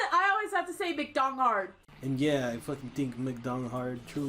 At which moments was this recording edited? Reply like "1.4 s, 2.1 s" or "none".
1.8 s